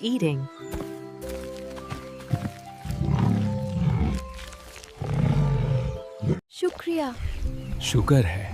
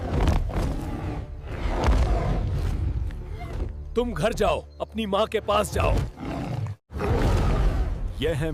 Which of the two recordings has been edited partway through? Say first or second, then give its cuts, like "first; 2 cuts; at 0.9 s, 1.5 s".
second; 1 cut; at 1.2 s